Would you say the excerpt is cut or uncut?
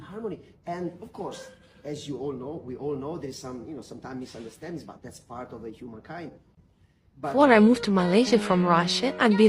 cut